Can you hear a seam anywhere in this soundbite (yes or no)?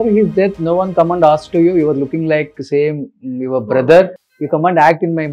no